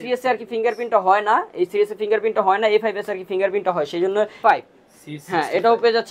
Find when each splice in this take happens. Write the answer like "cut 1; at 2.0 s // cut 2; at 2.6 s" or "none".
cut 1; at 4.3 s